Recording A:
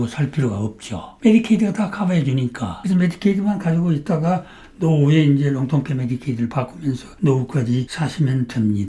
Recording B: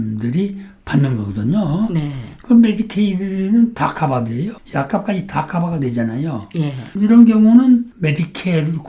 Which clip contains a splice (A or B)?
A